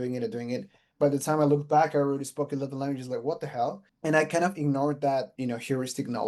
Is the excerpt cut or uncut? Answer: cut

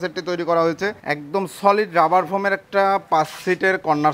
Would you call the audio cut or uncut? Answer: cut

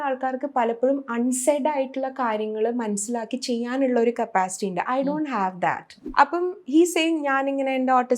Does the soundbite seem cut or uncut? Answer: cut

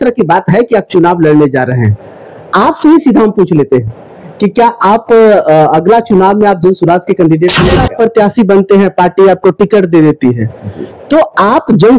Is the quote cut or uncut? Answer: cut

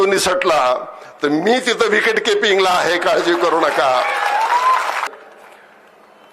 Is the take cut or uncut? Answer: cut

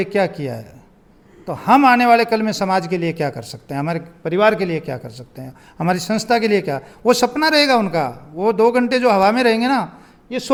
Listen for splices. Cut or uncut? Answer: uncut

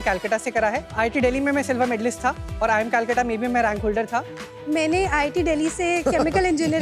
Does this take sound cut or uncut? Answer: cut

